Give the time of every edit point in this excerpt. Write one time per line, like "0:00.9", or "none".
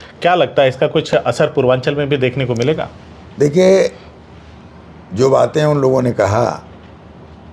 none